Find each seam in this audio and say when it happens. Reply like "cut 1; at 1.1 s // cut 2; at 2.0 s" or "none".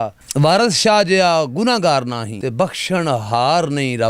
cut 1; at 2.3 s